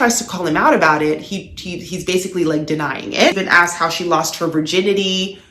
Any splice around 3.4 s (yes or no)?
yes